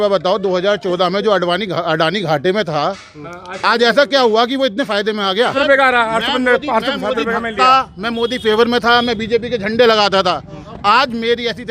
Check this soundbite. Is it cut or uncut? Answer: cut